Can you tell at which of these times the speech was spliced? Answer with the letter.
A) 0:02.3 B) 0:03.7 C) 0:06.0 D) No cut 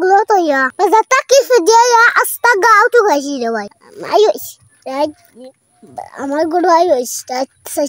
B